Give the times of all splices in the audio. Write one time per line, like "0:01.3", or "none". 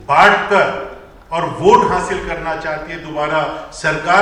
none